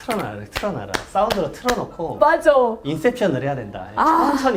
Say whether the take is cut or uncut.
uncut